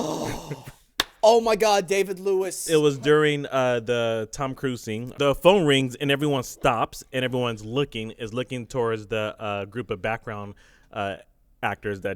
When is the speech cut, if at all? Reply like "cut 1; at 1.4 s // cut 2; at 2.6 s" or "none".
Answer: cut 1; at 2.6 s // cut 2; at 5.0 s